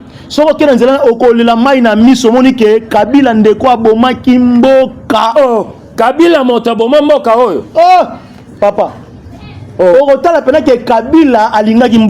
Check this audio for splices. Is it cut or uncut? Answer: uncut